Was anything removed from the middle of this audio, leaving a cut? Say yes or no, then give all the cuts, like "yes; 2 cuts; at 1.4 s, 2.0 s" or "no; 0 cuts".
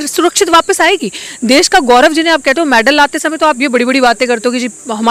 no; 0 cuts